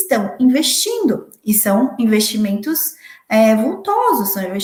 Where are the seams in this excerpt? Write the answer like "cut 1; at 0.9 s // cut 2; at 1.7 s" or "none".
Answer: none